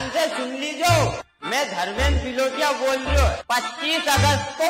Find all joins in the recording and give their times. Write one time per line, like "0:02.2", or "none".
none